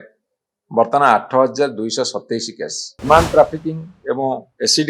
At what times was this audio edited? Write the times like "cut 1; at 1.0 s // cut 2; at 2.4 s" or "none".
cut 1; at 3.1 s